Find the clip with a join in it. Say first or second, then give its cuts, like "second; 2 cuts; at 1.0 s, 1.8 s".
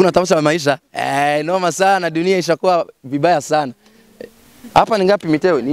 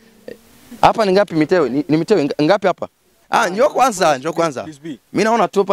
second; 1 cut; at 3.1 s